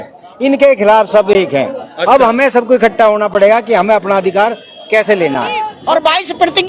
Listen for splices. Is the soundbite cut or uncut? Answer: cut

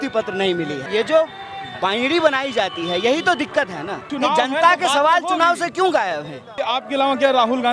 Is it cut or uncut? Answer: cut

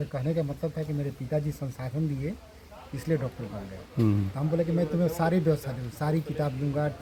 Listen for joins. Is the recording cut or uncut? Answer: uncut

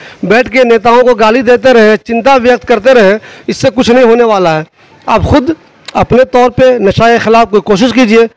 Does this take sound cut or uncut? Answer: uncut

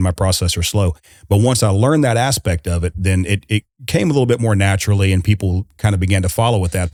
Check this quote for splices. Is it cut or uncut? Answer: uncut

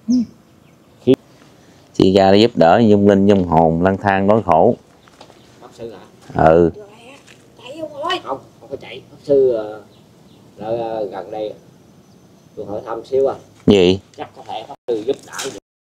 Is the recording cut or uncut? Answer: cut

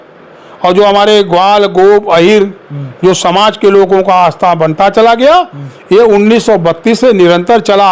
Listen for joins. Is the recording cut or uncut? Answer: uncut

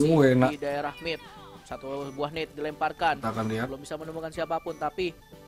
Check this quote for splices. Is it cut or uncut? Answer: uncut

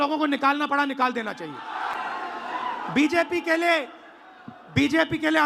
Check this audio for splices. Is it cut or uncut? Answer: cut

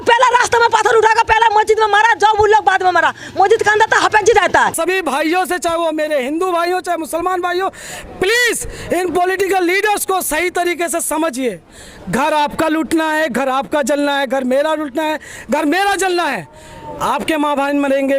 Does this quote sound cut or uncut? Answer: cut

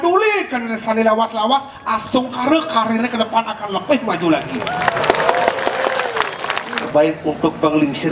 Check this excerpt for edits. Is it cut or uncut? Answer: cut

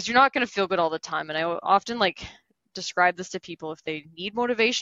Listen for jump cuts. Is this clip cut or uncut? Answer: uncut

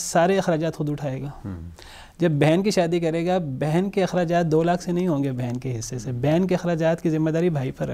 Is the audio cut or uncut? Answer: uncut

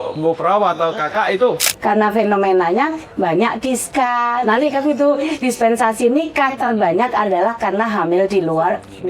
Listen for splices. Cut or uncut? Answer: cut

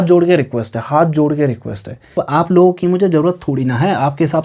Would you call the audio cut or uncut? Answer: cut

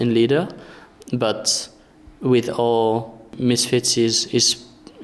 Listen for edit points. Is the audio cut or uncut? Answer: cut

